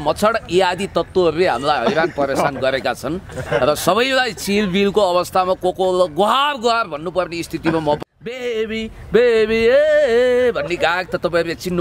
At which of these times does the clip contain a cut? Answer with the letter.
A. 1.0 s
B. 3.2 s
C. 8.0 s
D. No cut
C